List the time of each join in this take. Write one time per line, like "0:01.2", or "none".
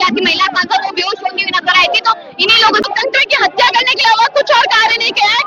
0:02.9